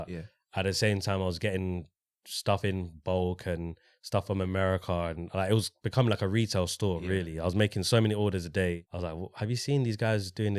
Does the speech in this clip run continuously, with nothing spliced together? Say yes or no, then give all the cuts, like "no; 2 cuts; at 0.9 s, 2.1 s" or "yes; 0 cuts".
no; 1 cut; at 8.9 s